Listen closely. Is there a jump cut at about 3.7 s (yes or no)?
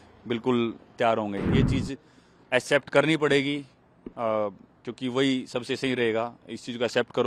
no